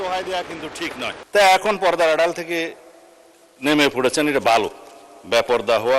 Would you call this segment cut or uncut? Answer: cut